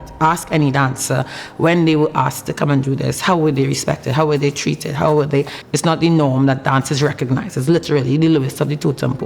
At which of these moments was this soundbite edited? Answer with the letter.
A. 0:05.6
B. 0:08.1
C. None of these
A